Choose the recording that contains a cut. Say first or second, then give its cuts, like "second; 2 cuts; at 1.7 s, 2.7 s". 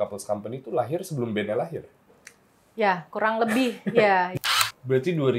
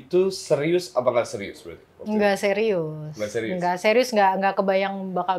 first; 1 cut; at 4.3 s